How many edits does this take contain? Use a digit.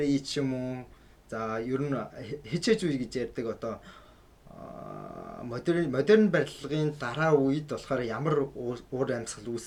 0